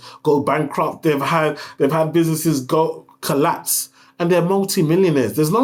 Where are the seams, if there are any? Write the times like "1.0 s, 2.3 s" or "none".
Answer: none